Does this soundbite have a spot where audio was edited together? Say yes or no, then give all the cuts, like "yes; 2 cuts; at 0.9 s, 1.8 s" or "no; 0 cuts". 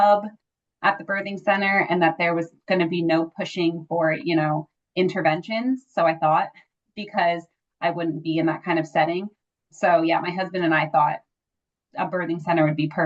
no; 0 cuts